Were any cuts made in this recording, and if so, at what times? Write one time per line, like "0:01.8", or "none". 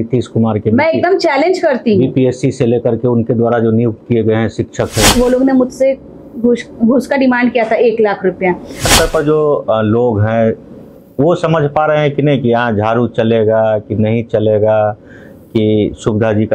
0:05.1
0:08.8